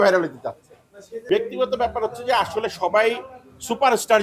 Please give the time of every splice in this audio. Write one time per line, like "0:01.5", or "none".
0:01.2